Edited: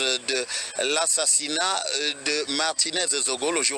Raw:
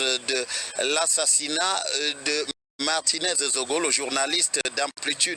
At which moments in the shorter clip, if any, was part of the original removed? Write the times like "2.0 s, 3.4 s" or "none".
2.5 s